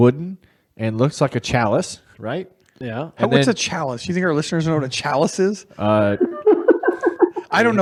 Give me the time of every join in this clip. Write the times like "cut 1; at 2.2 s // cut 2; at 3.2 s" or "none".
none